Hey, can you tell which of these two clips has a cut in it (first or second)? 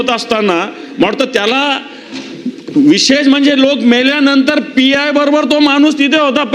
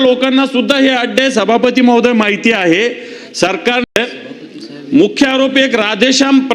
second